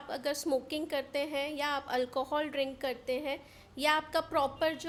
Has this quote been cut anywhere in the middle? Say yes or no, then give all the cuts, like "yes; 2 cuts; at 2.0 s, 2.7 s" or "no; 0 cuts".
no; 0 cuts